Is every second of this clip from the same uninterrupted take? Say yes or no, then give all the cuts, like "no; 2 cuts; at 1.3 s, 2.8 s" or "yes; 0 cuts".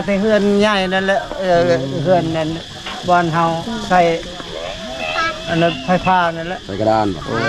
yes; 0 cuts